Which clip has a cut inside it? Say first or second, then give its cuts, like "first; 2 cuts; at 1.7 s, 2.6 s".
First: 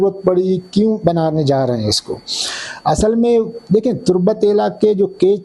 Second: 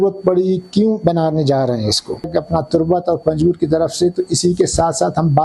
second; 1 cut; at 2.3 s